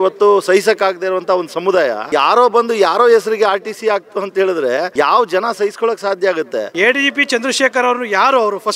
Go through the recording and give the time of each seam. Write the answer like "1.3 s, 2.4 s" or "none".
2.0 s, 4.9 s, 6.7 s